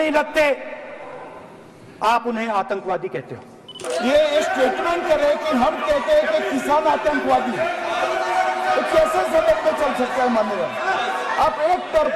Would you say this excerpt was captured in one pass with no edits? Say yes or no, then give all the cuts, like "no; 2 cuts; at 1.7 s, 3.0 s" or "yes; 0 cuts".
no; 1 cut; at 3.8 s